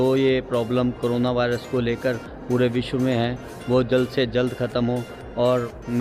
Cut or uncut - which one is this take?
uncut